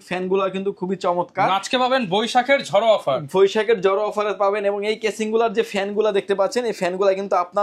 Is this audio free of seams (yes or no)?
yes